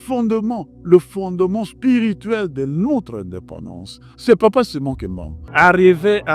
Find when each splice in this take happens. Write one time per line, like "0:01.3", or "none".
0:05.4